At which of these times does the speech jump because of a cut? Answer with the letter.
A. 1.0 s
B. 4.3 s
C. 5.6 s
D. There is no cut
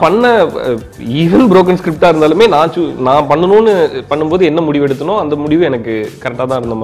D